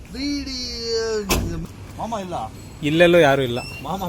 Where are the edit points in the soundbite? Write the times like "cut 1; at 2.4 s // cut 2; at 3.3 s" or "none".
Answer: cut 1; at 1.6 s